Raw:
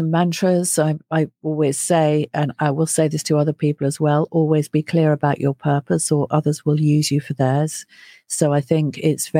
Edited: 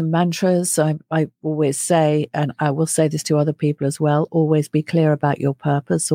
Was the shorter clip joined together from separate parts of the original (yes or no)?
no